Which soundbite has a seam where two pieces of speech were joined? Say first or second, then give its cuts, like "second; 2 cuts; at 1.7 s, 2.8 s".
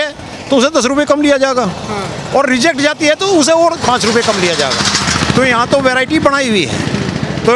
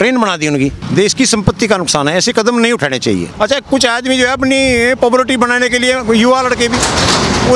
second; 2 cuts; at 0.8 s, 3.3 s